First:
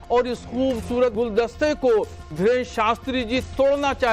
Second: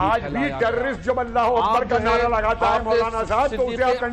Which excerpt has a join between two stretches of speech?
first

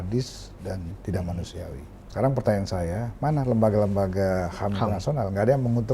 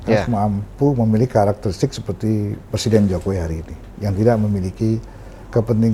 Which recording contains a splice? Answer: first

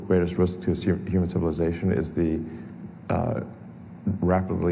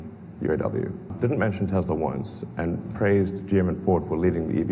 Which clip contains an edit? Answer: second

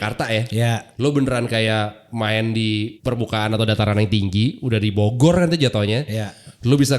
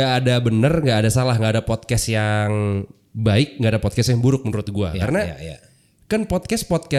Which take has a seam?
first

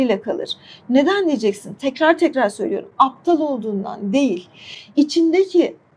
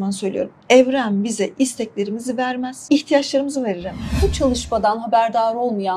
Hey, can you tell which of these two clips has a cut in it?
second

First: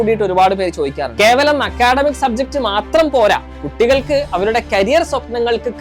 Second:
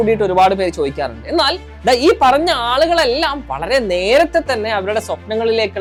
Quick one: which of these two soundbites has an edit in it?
first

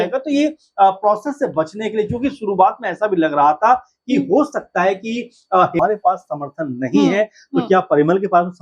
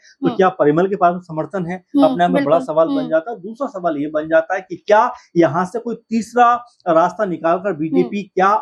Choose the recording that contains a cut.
first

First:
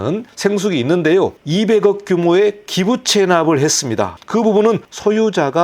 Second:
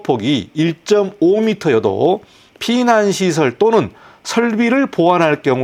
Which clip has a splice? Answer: first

